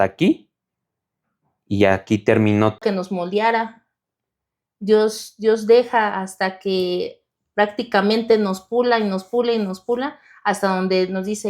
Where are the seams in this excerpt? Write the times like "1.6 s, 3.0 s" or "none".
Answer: 2.8 s